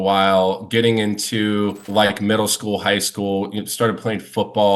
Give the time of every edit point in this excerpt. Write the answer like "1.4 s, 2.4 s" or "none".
1.8 s